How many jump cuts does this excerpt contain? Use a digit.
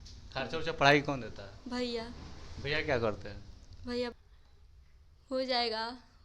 1